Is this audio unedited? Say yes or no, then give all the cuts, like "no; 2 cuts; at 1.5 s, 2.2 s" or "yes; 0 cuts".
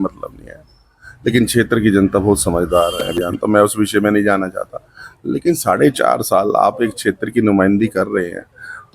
no; 1 cut; at 3.2 s